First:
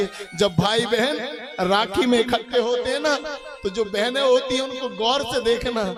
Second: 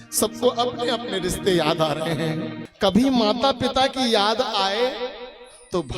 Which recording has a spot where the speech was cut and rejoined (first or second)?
second